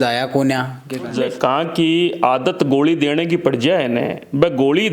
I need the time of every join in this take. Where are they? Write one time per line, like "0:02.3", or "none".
0:01.1